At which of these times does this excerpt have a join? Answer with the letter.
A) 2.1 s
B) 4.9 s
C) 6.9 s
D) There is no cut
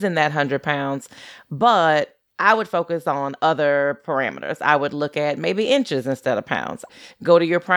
C